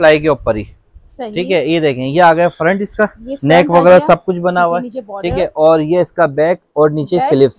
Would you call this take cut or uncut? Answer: uncut